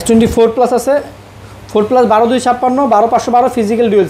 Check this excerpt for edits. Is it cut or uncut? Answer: uncut